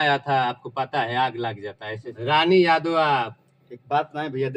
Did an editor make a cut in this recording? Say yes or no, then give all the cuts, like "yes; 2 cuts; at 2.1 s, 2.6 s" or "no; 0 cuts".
no; 0 cuts